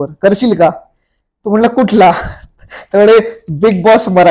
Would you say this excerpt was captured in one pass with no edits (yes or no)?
yes